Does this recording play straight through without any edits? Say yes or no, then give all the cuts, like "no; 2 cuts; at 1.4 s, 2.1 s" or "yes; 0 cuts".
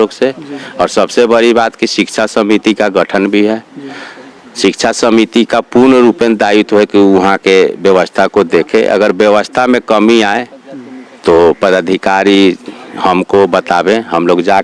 yes; 0 cuts